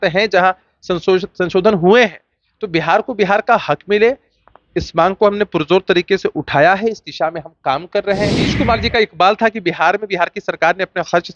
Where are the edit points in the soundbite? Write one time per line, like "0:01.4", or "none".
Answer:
0:08.6